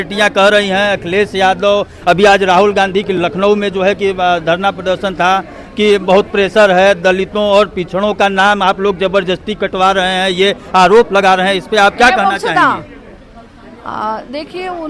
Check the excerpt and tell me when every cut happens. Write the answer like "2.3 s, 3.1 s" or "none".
none